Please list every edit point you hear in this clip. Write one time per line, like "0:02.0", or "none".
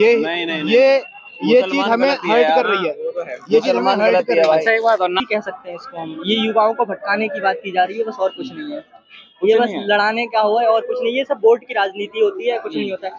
0:05.2